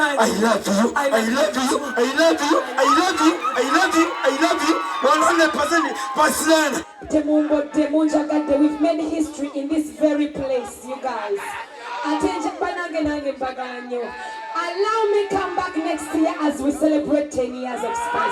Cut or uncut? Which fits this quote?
cut